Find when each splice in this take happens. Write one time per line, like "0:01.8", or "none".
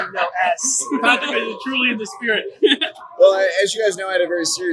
none